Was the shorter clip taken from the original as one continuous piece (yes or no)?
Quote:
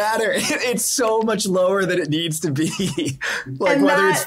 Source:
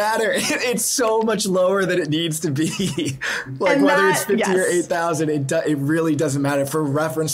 yes